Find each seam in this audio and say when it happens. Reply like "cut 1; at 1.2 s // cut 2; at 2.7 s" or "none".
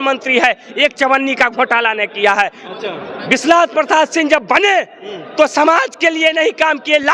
none